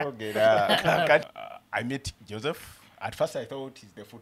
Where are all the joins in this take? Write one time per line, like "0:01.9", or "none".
0:01.3